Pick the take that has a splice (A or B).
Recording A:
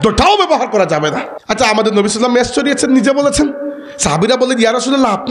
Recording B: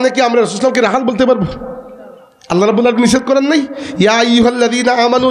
A